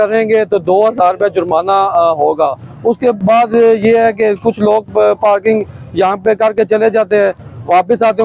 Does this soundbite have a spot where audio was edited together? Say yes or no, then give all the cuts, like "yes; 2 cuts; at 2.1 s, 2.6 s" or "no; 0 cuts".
no; 0 cuts